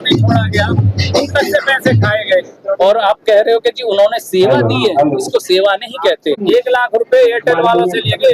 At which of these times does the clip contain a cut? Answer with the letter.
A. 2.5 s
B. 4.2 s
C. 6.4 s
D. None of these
C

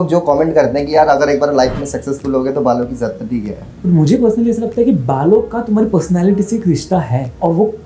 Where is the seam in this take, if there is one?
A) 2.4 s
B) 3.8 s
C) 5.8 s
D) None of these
B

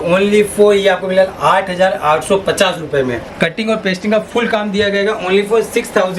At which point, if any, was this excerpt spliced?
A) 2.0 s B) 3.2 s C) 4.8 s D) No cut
B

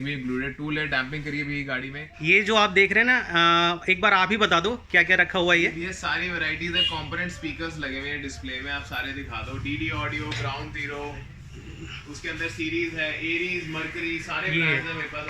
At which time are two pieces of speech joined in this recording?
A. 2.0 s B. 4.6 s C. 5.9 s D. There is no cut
A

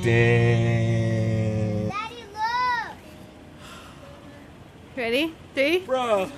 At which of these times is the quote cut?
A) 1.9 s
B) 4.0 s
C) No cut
A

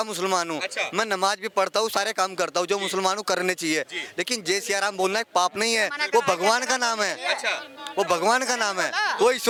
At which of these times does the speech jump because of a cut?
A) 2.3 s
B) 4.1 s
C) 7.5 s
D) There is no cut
D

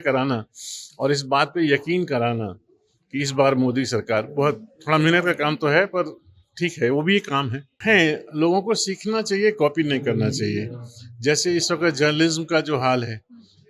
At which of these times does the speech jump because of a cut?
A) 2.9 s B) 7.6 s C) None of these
B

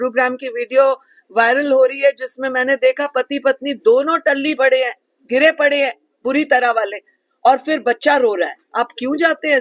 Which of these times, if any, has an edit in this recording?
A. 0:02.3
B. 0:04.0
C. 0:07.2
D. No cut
D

